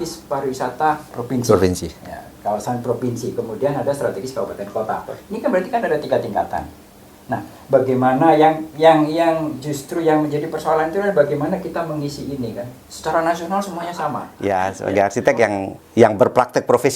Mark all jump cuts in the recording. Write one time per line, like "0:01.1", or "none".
0:14.3